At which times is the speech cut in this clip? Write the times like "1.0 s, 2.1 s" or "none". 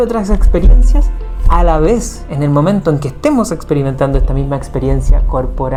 none